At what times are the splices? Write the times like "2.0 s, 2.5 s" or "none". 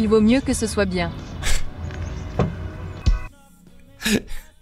3.0 s

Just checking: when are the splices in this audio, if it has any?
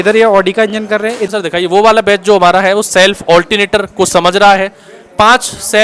1.3 s

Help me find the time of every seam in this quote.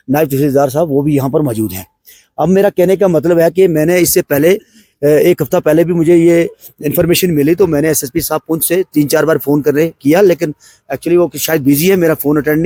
none

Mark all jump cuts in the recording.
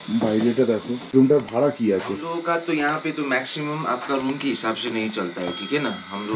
1.0 s

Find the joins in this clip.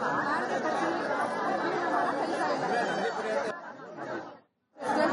2.8 s

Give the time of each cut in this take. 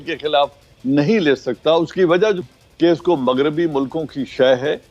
2.4 s

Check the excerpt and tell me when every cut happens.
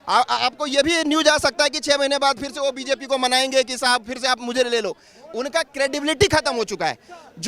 none

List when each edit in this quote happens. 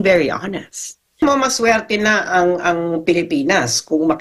1.2 s

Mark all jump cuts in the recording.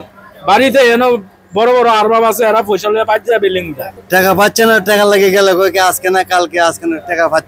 4.0 s

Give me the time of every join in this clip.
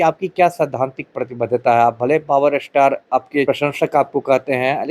3.5 s

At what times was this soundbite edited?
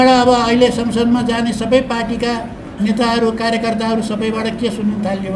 none

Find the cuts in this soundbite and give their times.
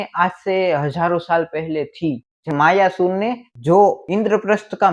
2.5 s

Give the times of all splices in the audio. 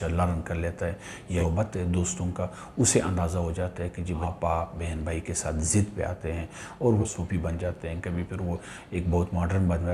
1.4 s, 4.2 s, 7.0 s

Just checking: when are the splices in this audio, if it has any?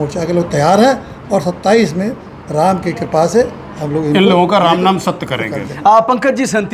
none

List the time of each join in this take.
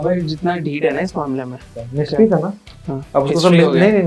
1.8 s

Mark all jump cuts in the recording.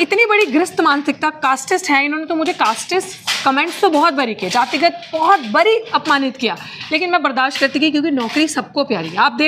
none

